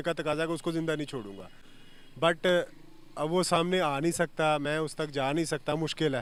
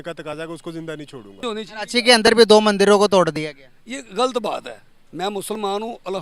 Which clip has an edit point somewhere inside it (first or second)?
second